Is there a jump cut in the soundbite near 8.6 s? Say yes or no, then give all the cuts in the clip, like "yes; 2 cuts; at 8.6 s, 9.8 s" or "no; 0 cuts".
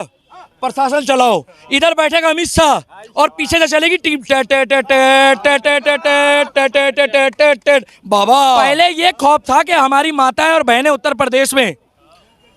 yes; 1 cut; at 8.6 s